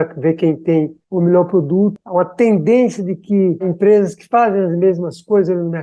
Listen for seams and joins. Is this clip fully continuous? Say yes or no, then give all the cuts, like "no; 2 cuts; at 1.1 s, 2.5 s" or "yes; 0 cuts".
no; 3 cuts; at 1.0 s, 2.0 s, 3.7 s